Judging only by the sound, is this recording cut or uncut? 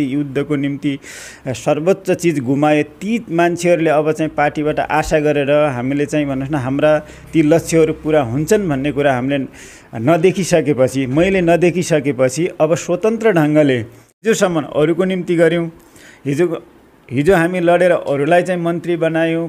cut